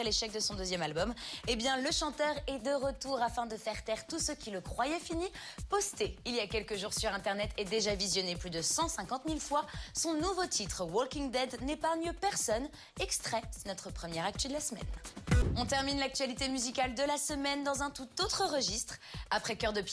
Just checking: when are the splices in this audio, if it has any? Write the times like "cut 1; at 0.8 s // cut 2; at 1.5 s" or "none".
cut 1; at 8.1 s